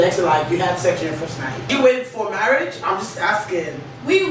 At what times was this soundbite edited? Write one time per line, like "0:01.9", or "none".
0:01.7